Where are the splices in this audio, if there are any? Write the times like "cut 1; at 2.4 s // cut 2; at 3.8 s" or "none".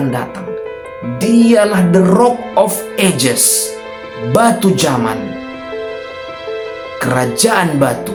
none